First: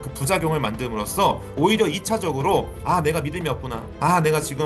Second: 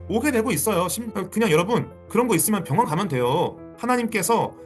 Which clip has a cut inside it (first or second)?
second